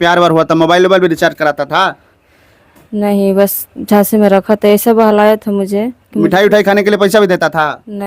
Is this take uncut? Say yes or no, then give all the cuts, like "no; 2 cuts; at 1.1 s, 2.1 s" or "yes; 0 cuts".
yes; 0 cuts